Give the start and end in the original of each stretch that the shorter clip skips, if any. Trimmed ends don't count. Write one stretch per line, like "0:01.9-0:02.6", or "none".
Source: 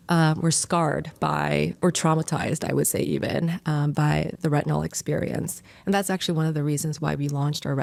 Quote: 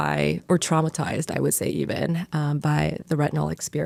none

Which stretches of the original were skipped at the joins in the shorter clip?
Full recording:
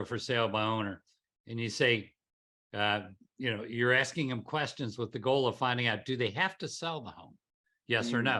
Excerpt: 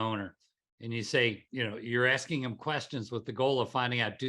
0:02.1-0:03.3

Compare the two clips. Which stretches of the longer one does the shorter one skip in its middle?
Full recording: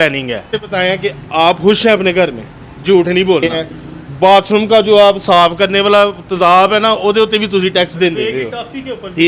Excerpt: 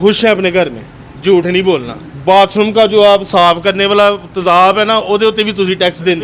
0:03.5-0:03.8

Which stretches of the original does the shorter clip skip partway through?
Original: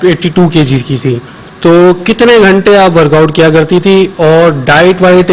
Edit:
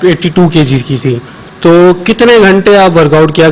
none

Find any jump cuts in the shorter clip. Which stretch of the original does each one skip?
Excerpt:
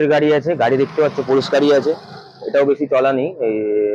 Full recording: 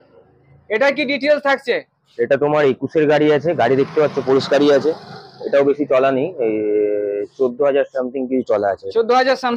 none

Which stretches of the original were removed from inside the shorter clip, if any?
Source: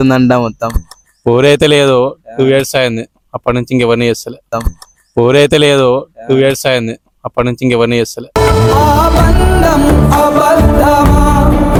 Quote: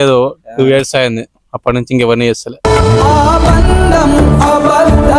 0:04.3-0:08.2

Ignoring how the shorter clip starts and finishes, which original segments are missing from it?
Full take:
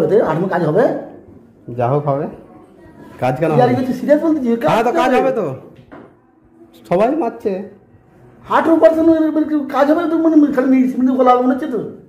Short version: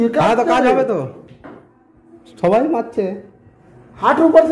none

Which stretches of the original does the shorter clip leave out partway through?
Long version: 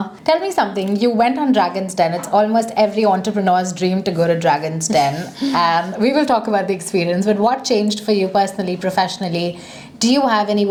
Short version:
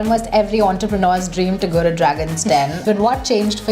0:05.3-0:07.2

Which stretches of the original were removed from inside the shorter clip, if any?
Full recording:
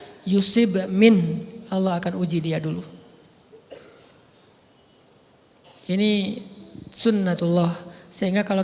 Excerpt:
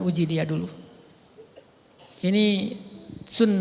0:03.7-0:05.2

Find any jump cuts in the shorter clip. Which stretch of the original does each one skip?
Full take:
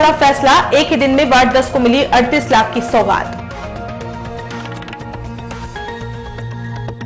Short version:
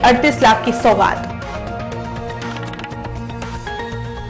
none

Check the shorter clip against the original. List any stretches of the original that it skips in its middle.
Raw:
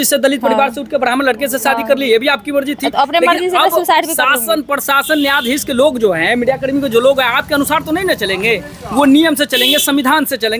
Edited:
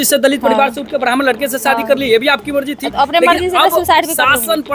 none

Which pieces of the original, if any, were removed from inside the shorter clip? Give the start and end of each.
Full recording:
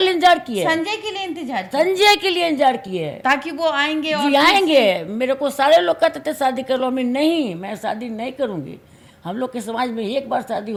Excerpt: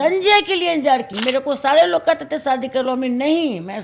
0:02.9-0:05.1

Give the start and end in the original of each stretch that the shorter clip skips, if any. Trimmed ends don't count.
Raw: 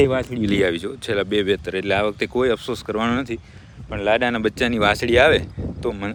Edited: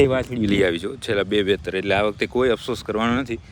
none

